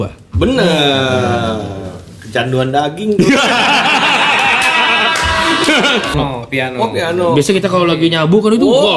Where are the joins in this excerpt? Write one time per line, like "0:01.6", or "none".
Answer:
0:06.1